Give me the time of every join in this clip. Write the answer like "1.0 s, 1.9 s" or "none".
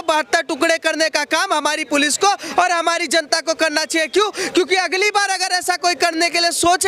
none